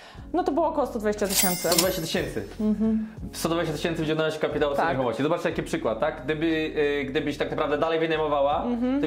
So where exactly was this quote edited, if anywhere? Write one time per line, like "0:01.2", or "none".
none